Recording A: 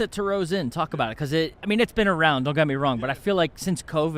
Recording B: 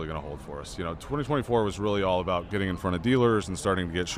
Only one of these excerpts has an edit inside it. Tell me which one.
A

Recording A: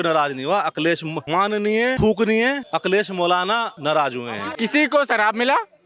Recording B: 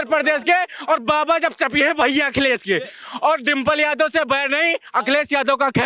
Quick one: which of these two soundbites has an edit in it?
A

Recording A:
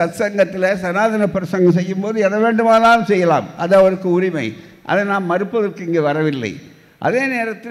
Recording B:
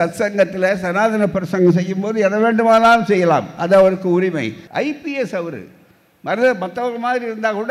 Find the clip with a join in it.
B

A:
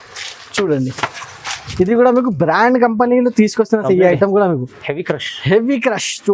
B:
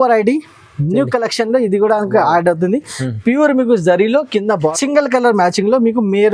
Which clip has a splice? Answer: B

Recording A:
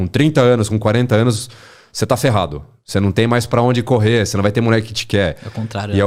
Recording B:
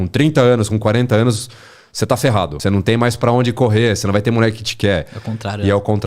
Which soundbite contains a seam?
B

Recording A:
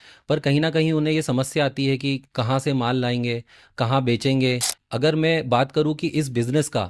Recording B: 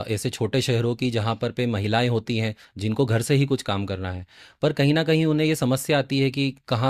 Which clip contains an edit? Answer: A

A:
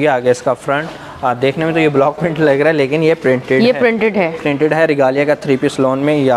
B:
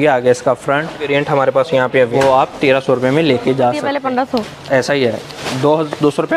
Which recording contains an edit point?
B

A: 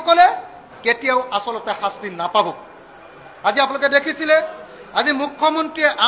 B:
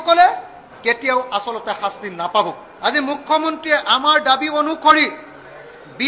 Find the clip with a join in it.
B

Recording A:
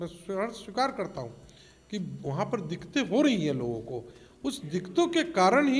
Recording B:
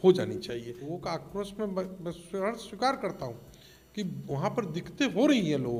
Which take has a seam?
B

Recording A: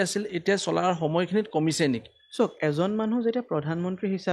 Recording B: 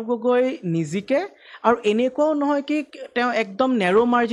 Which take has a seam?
A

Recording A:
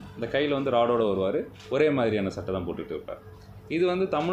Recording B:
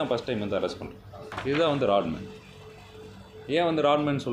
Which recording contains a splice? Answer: B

